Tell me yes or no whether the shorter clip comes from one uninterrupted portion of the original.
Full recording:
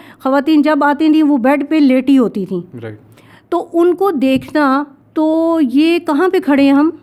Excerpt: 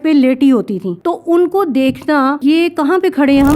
no